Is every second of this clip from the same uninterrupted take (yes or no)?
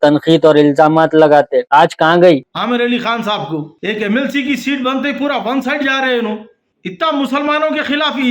no